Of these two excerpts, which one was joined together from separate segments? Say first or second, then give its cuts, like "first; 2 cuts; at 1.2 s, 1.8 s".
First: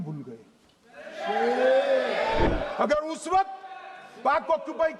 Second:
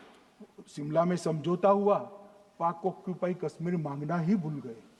first; 1 cut; at 2.5 s